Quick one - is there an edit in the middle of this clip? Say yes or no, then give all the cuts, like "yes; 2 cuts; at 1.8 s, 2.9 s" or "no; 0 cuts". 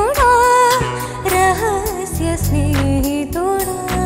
no; 0 cuts